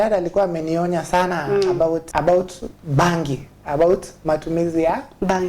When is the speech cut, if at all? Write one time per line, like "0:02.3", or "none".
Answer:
0:02.1